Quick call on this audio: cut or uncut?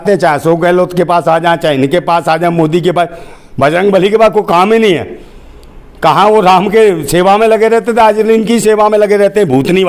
uncut